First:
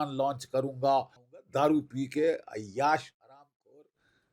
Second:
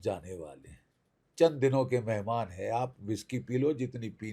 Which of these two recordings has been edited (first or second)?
first